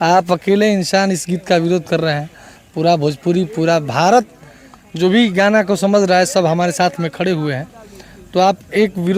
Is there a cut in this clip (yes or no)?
no